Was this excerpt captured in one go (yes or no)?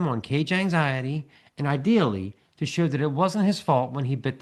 yes